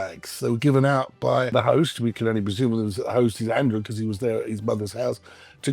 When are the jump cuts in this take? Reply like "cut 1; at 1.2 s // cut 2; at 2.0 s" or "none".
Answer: cut 1; at 1.5 s